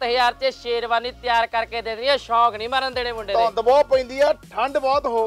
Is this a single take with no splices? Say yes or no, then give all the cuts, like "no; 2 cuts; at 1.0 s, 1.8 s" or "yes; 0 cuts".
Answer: yes; 0 cuts